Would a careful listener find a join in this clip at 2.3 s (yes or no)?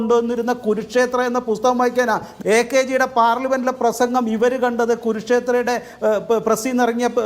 yes